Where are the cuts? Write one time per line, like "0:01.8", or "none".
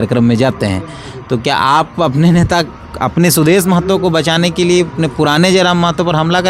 none